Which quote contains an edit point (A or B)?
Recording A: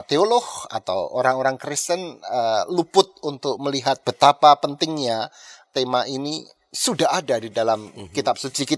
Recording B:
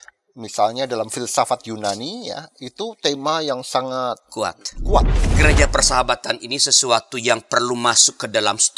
B